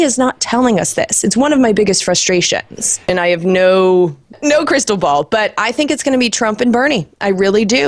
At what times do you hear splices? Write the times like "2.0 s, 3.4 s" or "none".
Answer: 3.1 s, 4.3 s

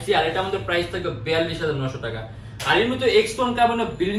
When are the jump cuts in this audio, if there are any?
none

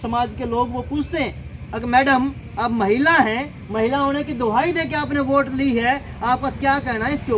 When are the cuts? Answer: none

